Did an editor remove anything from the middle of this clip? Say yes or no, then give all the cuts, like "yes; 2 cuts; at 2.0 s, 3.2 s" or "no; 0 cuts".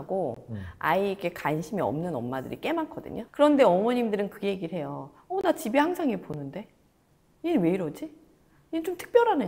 yes; 1 cut; at 3.3 s